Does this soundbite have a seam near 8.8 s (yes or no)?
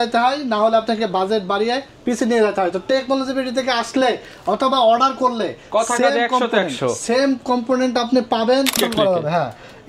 yes